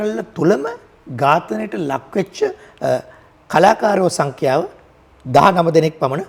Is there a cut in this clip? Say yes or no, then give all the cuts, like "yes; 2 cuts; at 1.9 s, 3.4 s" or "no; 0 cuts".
no; 0 cuts